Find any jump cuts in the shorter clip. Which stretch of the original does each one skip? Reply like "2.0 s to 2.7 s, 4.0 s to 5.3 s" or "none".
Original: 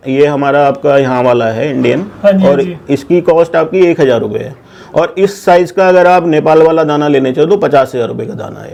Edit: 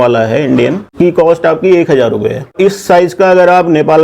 2.2 s to 3.0 s, 4.6 s to 5.1 s